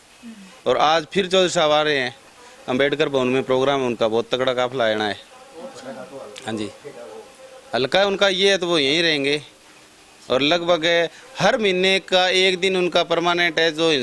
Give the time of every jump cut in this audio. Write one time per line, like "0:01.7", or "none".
none